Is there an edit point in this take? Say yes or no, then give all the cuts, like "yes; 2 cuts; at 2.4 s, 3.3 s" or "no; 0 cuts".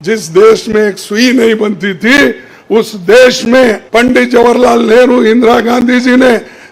yes; 1 cut; at 3.8 s